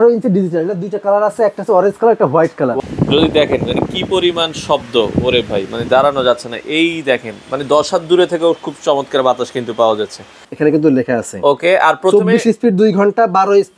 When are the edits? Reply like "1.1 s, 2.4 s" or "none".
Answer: 2.8 s, 10.4 s